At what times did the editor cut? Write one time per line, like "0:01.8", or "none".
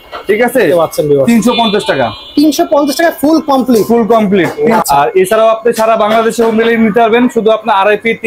0:04.8